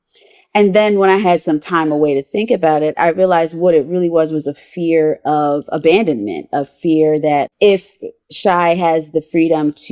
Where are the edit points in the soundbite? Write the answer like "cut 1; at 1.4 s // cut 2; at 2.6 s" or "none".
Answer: cut 1; at 7.5 s

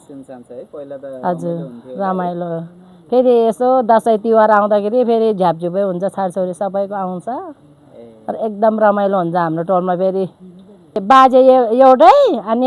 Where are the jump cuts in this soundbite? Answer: cut 1; at 11.0 s

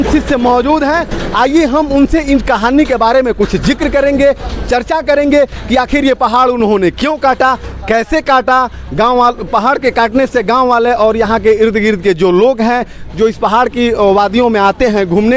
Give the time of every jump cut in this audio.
none

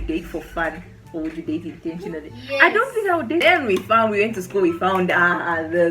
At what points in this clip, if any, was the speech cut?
cut 1; at 3.4 s

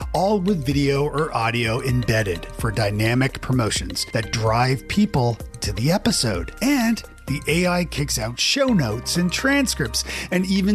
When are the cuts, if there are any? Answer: none

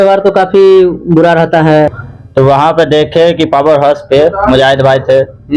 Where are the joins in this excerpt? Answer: cut 1; at 1.9 s

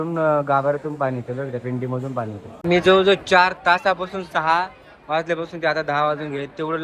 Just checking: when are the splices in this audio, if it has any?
cut 1; at 2.6 s

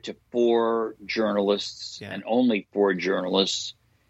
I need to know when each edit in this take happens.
none

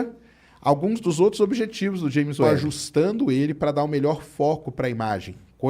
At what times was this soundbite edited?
cut 1; at 2.5 s

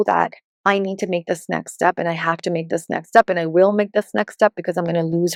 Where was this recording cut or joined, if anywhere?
none

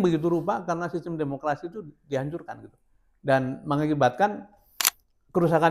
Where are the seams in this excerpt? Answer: none

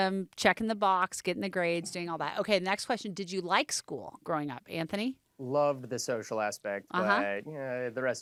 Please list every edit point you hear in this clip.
none

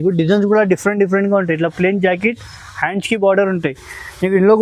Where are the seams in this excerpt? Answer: none

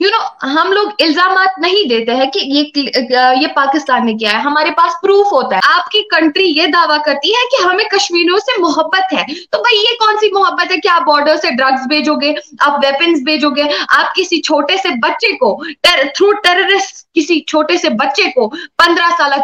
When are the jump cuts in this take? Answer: cut 1; at 5.6 s

